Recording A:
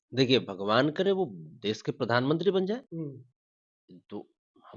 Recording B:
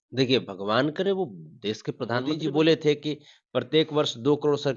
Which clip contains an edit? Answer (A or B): B